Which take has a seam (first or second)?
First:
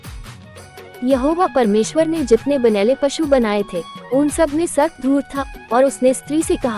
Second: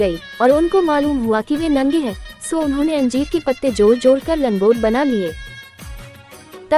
first